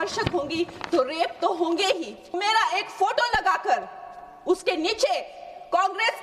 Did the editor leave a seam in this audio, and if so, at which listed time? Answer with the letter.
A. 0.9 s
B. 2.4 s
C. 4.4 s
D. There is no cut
B